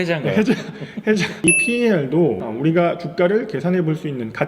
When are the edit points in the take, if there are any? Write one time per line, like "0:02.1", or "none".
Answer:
0:01.6